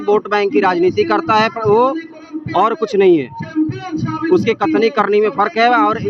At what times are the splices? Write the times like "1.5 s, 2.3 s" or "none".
none